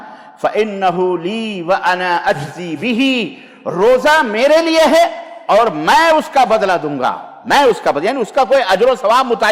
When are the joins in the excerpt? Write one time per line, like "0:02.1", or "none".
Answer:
none